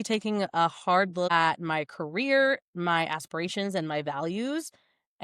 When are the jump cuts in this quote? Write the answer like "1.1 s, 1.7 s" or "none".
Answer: 1.3 s

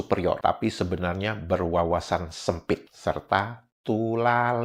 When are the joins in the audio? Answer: none

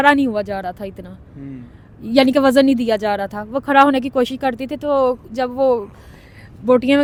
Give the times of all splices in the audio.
none

